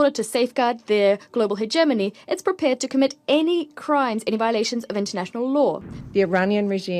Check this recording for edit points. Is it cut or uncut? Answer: cut